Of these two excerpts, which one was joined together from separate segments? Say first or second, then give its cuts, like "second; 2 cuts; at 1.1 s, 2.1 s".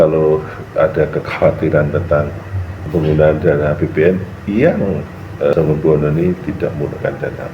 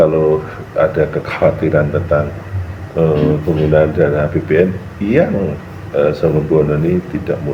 first; 2 cuts; at 2.9 s, 5.5 s